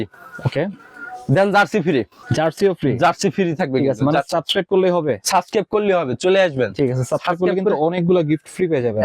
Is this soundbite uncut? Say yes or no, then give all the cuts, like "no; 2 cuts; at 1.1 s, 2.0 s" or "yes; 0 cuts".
no; 1 cut; at 1.8 s